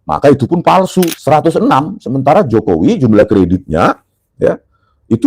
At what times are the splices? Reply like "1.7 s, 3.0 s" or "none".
1.2 s